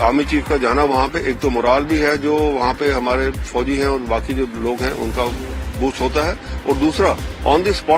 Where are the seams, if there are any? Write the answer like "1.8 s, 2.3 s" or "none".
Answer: none